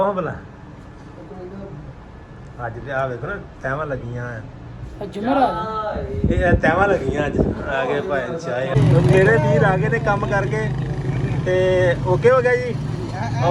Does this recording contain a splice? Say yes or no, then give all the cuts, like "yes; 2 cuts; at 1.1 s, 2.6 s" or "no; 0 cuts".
yes; 1 cut; at 8.7 s